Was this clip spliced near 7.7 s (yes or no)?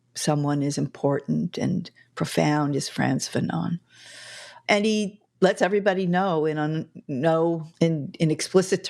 yes